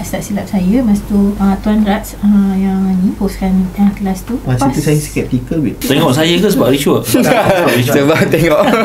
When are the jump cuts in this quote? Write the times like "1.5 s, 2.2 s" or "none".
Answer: 1.4 s, 3.2 s, 4.5 s, 5.8 s